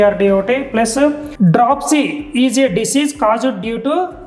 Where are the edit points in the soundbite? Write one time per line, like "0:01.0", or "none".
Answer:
0:01.3